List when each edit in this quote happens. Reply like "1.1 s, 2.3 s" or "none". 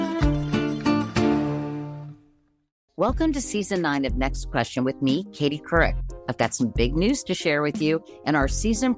2.7 s